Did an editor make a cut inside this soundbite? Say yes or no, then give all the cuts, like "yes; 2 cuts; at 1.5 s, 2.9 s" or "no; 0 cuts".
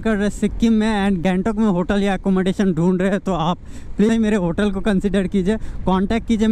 yes; 2 cuts; at 1.2 s, 4.1 s